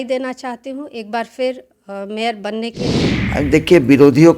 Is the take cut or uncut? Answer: cut